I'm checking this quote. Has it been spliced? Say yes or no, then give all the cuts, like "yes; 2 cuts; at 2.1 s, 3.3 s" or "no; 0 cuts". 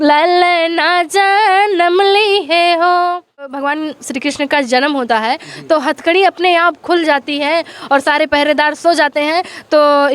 yes; 1 cut; at 3.6 s